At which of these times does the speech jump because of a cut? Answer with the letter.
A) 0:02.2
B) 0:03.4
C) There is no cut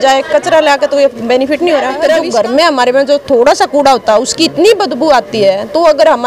A